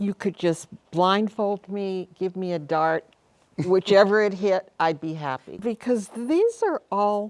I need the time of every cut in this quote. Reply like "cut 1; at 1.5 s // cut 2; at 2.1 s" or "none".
cut 1; at 5.6 s